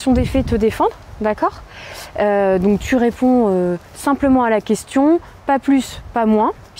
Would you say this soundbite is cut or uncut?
uncut